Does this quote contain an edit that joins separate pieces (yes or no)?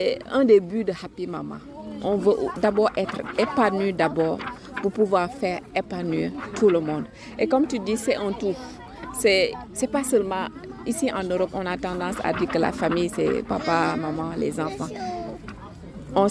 no